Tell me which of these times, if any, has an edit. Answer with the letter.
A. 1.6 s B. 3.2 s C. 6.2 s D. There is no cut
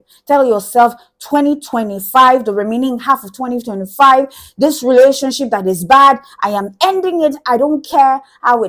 D